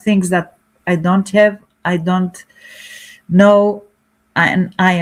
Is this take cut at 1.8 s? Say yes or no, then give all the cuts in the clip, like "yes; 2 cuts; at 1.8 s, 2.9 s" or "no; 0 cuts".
no; 0 cuts